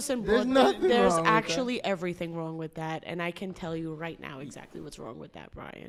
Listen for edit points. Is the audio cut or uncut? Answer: uncut